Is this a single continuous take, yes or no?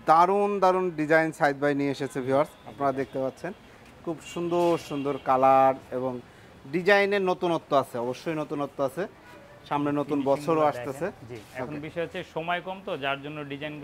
yes